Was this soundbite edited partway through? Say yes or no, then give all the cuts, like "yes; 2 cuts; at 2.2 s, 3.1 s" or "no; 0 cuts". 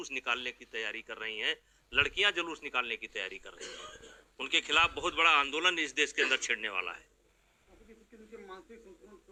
no; 0 cuts